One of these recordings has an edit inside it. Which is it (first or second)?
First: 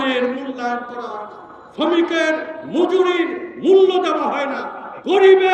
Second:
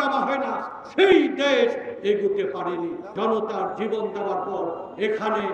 second